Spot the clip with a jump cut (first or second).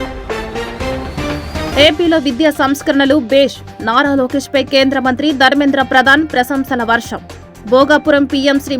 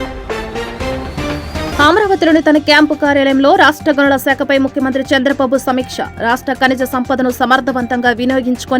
first